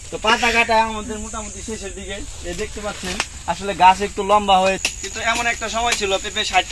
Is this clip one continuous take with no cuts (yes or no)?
no